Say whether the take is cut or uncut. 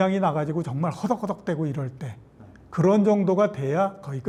uncut